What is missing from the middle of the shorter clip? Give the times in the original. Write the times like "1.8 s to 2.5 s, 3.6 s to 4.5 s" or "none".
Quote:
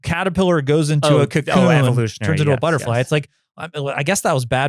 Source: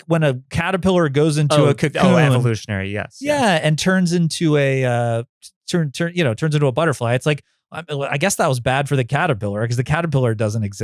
2.7 s to 6.4 s